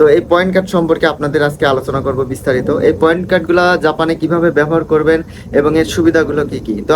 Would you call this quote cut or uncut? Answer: uncut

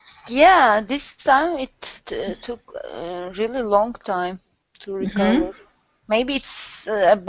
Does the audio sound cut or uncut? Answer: cut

